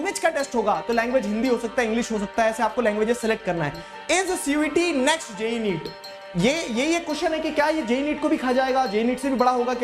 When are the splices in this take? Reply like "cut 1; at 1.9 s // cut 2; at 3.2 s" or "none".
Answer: cut 1; at 3.9 s